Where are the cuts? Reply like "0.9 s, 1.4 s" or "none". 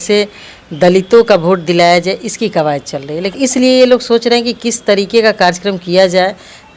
3.3 s